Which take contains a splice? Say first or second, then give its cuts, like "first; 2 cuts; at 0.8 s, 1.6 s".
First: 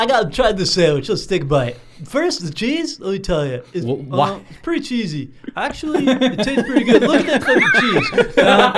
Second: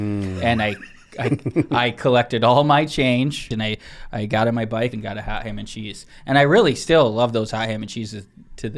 second; 2 cuts; at 3.6 s, 4.9 s